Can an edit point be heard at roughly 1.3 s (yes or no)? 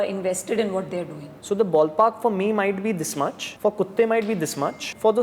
yes